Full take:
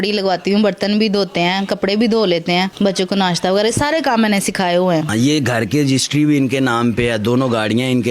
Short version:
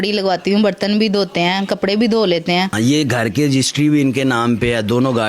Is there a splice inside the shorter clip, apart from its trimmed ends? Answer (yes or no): yes